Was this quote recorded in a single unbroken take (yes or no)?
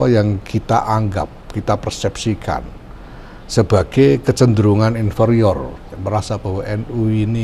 no